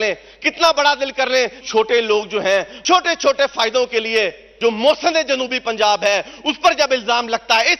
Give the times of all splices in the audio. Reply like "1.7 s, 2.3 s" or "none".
1.6 s, 2.7 s, 4.5 s